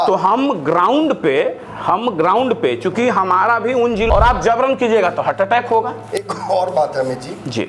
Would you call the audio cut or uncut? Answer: cut